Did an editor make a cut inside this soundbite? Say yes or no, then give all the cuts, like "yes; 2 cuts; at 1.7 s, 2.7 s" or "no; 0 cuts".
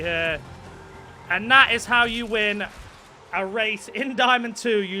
no; 0 cuts